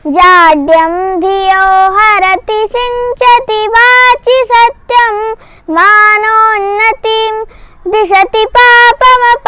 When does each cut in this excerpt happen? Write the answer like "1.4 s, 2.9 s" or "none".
none